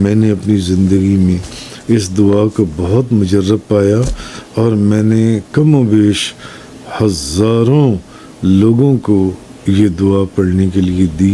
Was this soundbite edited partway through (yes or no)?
no